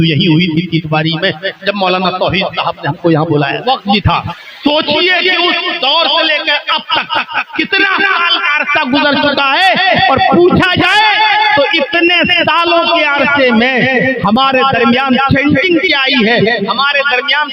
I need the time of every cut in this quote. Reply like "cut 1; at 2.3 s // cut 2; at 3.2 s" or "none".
cut 1; at 3.6 s // cut 2; at 4.2 s